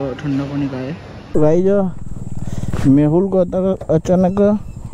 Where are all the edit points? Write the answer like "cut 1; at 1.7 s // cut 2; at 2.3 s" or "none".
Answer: cut 1; at 1.1 s